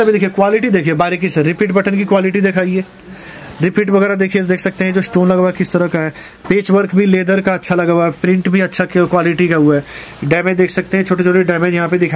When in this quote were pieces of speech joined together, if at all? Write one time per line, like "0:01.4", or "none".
none